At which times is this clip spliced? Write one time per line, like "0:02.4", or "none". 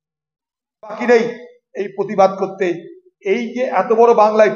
0:01.0